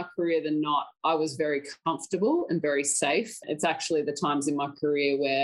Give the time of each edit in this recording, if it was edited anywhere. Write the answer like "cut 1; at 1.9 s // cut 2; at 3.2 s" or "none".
cut 1; at 3.4 s